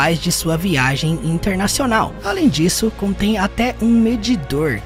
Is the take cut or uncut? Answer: uncut